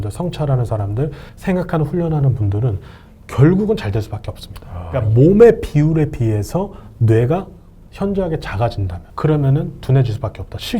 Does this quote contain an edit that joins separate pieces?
yes; 3 cuts; at 1.3 s, 5.1 s, 9.0 s

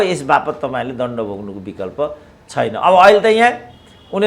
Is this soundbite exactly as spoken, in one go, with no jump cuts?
yes; 0 cuts

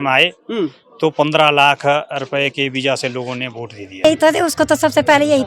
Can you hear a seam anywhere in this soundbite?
yes; 1 cut; at 4.0 s

